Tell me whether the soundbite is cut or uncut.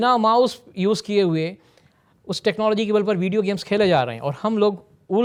uncut